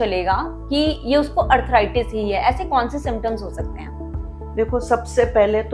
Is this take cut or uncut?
uncut